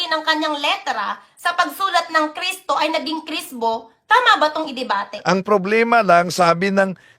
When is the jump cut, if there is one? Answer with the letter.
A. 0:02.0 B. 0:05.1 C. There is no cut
B